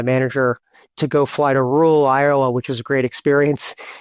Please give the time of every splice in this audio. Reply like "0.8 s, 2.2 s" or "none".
0.9 s